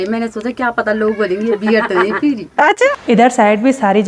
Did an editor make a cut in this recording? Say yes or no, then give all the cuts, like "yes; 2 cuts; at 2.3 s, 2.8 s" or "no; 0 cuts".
yes; 1 cut; at 2.9 s